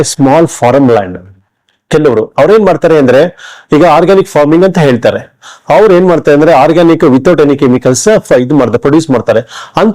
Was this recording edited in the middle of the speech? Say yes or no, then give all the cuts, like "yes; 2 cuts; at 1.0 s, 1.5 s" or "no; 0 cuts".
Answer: no; 0 cuts